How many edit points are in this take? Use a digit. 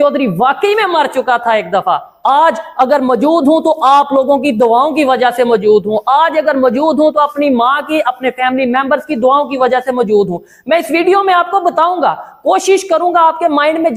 0